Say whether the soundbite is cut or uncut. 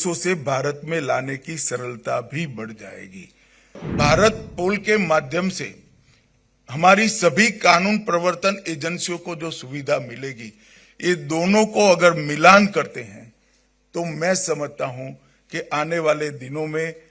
cut